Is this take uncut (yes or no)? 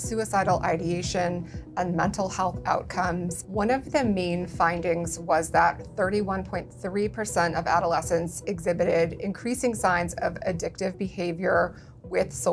no